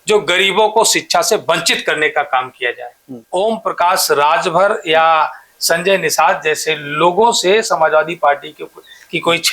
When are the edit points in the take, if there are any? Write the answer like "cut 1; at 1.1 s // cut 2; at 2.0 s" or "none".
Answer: cut 1; at 3.1 s